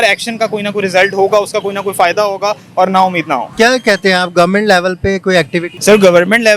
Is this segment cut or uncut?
cut